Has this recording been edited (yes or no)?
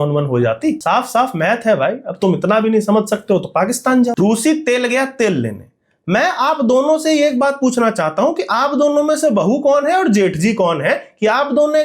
yes